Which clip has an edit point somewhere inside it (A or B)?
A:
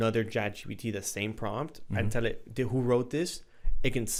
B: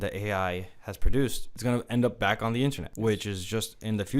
B